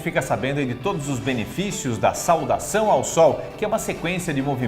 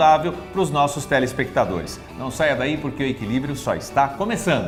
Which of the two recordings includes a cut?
first; 1 cut; at 1.1 s

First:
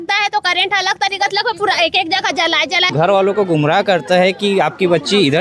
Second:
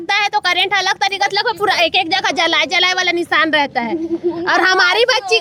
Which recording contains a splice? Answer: first; 1 cut; at 2.9 s

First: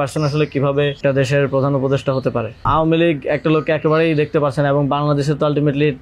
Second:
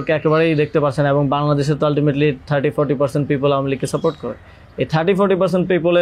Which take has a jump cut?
first; 2 cuts; at 1.0 s, 2.6 s

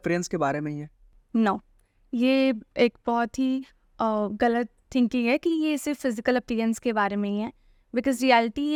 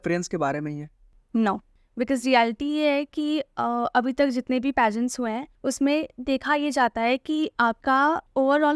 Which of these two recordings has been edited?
second; 3 cuts; at 1.8 s, 5.5 s, 8.0 s

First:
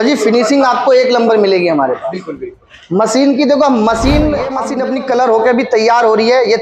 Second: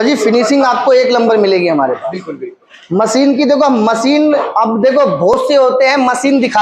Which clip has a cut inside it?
first; 1 cut; at 4.6 s

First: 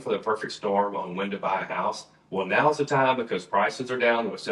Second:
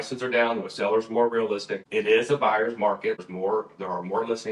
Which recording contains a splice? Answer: second; 2 cuts; at 1.8 s, 3.2 s

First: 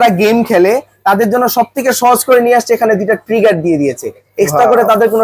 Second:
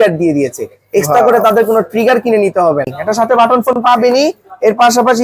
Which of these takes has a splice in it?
second; 1 cut; at 3.0 s

